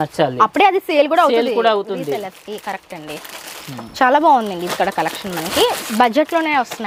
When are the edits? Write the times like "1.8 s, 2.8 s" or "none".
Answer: none